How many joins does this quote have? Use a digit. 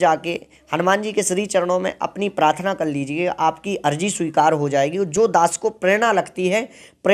0